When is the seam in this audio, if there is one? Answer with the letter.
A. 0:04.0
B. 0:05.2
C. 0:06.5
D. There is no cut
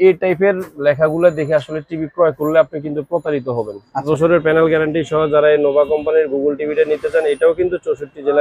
A